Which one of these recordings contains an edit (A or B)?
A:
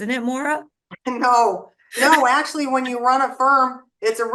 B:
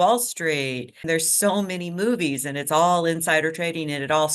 B